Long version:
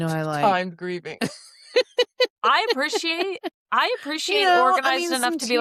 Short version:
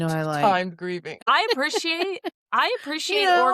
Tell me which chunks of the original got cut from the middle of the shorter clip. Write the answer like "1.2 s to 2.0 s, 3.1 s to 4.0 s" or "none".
1.2 s to 2.4 s